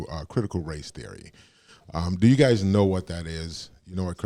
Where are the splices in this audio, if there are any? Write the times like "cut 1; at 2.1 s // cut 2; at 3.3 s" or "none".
none